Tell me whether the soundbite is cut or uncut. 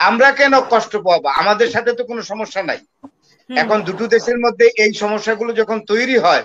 uncut